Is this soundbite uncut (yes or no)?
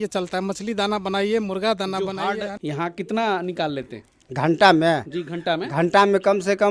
no